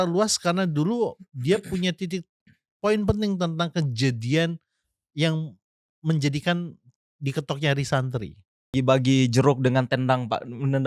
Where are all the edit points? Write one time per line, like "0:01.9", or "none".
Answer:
0:08.7